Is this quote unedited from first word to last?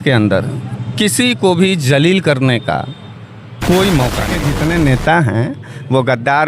no; 1 cut; at 4.4 s

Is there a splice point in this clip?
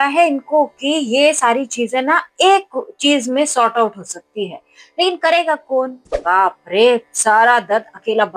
yes; 1 cut; at 6.2 s

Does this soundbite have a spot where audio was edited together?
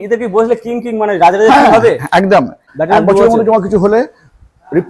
yes; 1 cut; at 2.6 s

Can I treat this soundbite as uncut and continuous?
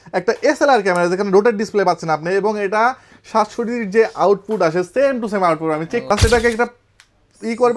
no; 1 cut; at 6.0 s

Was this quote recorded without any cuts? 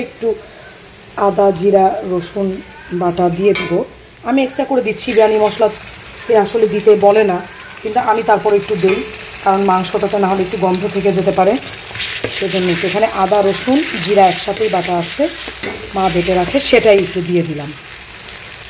yes; 0 cuts

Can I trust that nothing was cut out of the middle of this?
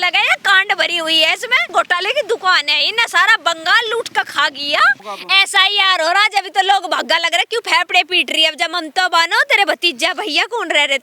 no; 2 cuts; at 1.7 s, 5.0 s

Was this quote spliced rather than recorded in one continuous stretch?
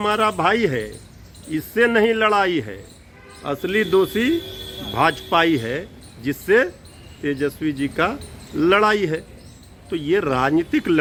no; 0 cuts

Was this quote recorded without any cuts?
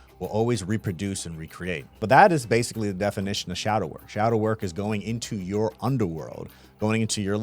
no; 1 cut; at 2.0 s

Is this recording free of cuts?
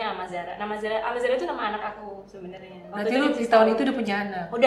yes; 0 cuts

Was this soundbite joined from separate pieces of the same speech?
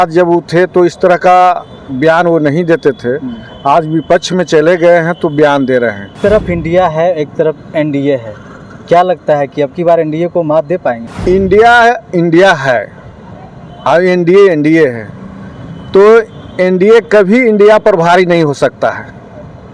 yes; 2 cuts; at 6.2 s, 11.1 s

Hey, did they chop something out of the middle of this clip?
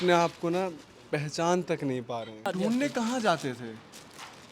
yes; 1 cut; at 2.5 s

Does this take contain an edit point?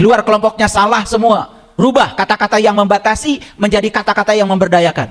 yes; 1 cut; at 1.6 s

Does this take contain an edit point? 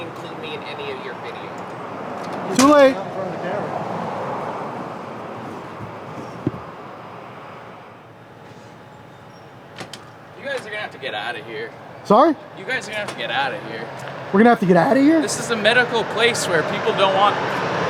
no; 0 cuts

